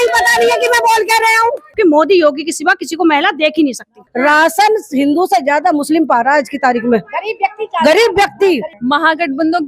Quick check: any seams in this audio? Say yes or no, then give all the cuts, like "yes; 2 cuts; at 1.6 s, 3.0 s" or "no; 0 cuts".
yes; 3 cuts; at 1.7 s, 4.0 s, 8.7 s